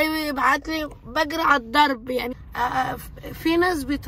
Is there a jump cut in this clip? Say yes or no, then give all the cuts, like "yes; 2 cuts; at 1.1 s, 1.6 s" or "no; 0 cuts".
yes; 1 cut; at 2.3 s